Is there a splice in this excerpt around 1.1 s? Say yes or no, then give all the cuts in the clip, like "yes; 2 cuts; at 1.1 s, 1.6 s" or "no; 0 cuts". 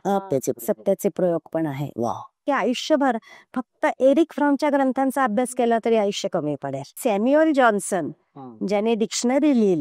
no; 2 cuts; at 2.4 s, 7.0 s